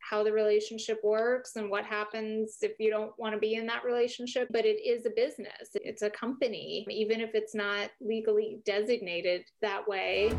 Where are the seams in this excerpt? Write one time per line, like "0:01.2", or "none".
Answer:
0:04.5
0:09.5